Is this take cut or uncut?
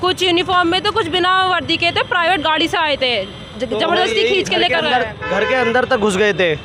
uncut